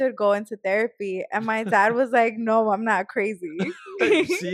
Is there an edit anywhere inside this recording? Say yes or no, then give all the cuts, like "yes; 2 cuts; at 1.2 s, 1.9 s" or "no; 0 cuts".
no; 0 cuts